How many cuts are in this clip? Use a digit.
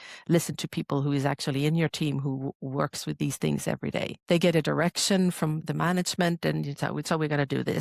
2